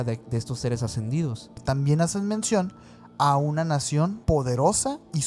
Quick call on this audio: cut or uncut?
cut